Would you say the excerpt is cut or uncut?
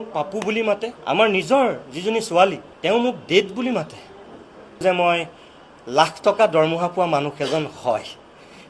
cut